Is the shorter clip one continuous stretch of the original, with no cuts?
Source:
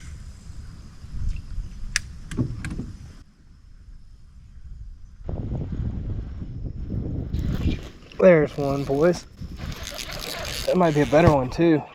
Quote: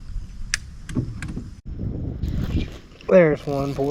no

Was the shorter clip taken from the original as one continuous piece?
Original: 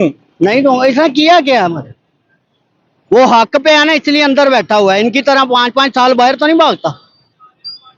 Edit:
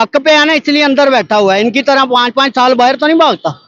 yes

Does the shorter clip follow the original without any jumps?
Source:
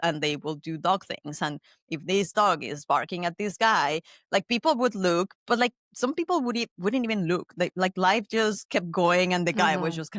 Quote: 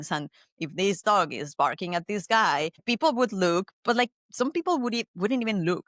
no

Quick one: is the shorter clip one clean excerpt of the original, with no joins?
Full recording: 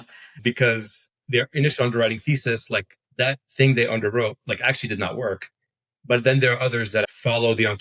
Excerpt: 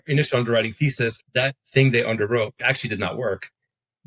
no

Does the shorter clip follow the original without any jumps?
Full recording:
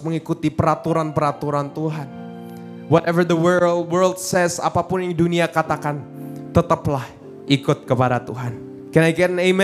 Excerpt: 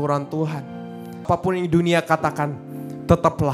no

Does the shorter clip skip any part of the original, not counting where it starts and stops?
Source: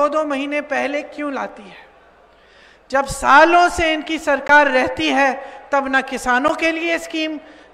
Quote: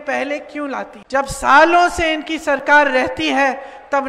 yes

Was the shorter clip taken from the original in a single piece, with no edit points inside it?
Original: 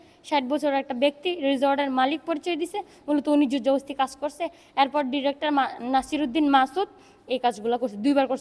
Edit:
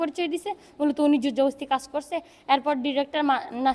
yes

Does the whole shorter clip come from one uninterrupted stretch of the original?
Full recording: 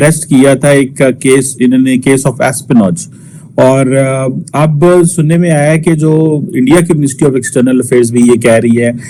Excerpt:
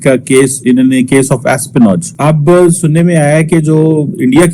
no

